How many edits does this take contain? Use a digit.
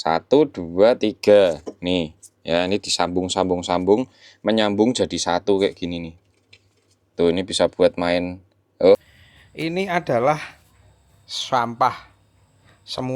1